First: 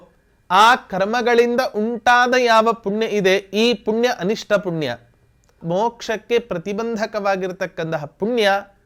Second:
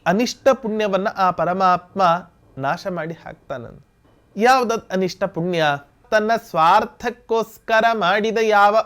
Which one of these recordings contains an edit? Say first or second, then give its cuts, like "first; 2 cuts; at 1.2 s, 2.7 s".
second; 1 cut; at 6.0 s